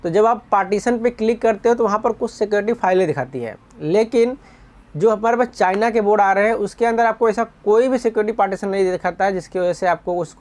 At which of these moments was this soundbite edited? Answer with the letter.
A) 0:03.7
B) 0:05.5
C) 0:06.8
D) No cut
D